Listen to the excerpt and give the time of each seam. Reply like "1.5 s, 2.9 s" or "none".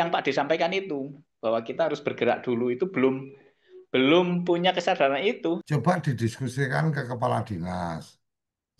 5.6 s